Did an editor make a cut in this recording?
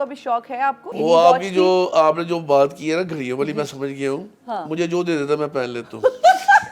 yes; 1 cut; at 0.9 s

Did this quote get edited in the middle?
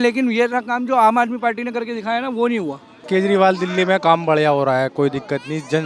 yes; 1 cut; at 2.9 s

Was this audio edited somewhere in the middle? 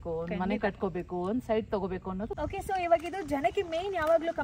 yes; 1 cut; at 2.4 s

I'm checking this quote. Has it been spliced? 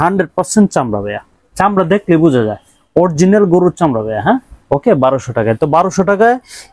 no; 0 cuts

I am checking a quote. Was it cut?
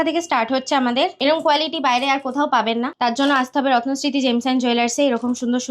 yes; 2 cuts; at 1.2 s, 2.9 s

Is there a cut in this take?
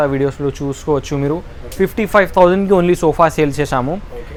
no; 0 cuts

